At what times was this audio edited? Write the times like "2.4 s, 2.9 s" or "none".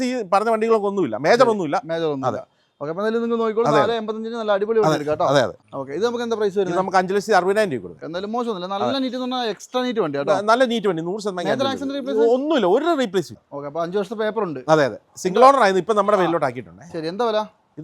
5.6 s, 8.0 s, 13.4 s